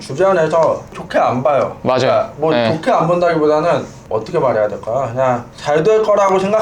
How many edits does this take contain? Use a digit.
3